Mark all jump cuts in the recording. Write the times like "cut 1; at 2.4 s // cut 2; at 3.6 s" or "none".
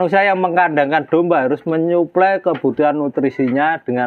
none